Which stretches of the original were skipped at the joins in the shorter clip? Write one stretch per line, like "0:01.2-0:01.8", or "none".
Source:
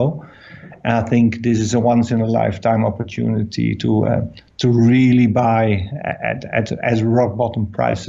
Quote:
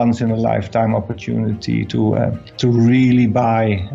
0:04.3-0:04.4